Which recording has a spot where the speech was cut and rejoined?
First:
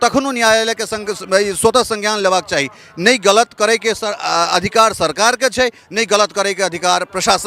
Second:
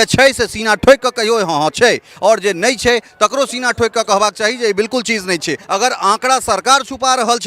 second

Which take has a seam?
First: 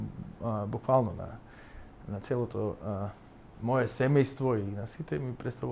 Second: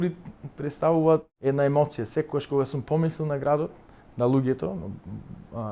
second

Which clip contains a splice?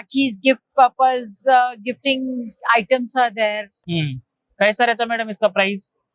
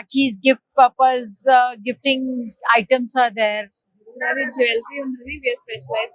second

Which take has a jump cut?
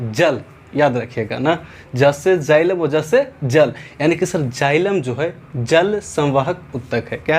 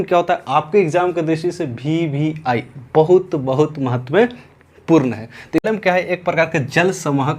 second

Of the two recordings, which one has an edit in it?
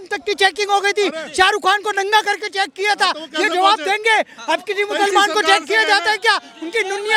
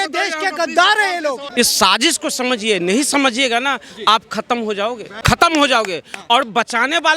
second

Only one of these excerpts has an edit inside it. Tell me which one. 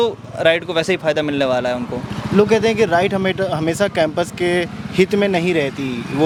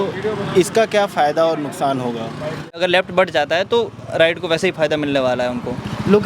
second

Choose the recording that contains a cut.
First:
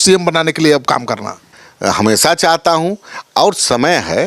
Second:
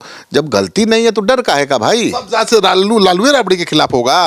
first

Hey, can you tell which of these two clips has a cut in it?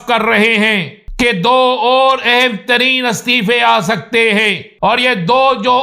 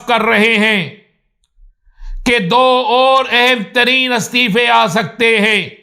first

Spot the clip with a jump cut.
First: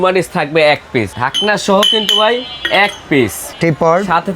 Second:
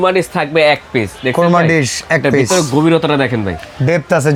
first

